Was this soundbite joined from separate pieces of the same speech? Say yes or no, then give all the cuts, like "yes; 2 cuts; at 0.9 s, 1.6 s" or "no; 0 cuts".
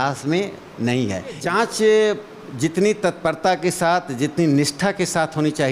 yes; 1 cut; at 1.4 s